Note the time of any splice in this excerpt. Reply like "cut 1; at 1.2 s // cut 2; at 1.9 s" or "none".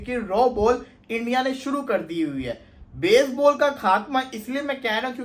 none